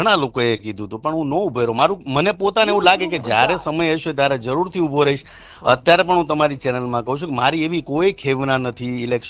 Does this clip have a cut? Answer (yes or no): no